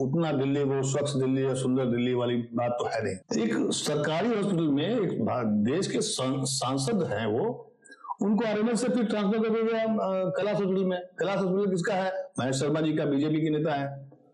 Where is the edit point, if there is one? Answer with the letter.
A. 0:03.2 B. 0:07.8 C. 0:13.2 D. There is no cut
A